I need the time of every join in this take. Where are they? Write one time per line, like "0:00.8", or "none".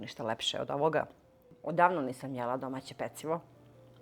0:01.5